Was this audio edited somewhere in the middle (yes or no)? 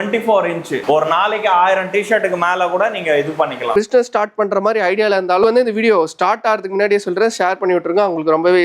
yes